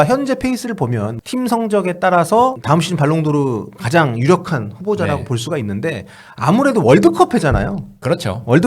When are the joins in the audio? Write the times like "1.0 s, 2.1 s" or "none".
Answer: 1.1 s, 2.6 s